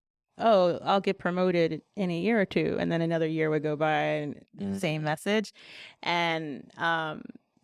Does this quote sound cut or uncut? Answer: uncut